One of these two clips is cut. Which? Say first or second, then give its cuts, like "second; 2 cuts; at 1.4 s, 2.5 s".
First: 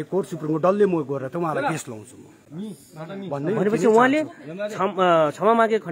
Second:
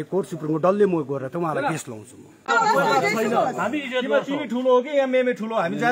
second; 1 cut; at 2.4 s